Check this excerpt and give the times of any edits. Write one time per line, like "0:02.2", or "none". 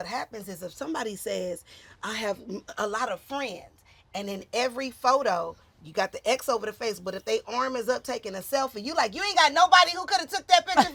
none